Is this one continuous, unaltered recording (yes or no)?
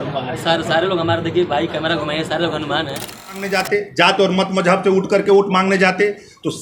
no